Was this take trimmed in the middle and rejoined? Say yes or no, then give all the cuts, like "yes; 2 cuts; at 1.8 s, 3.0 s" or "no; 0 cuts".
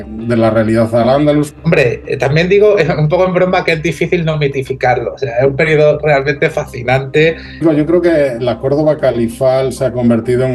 yes; 2 cuts; at 1.5 s, 7.6 s